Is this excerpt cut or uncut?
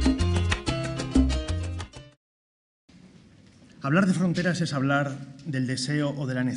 uncut